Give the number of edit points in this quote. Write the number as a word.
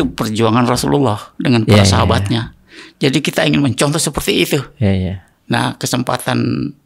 zero